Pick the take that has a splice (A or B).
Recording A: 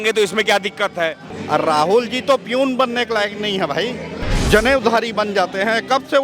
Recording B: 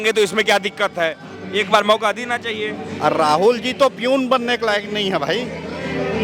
A